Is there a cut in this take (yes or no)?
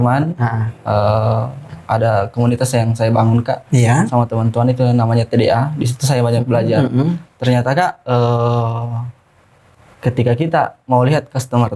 no